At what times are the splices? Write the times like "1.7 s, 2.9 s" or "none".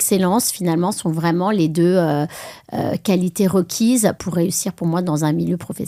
none